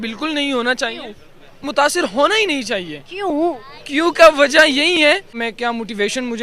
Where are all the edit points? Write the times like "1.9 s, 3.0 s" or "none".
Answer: 5.5 s